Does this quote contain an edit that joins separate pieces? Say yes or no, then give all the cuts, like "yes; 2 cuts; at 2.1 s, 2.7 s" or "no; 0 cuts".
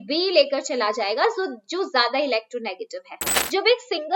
yes; 1 cut; at 3.1 s